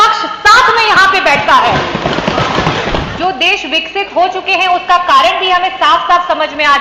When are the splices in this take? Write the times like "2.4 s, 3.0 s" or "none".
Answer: 3.1 s